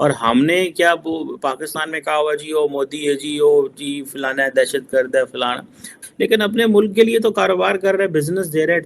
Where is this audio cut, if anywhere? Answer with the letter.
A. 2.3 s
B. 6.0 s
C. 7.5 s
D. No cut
B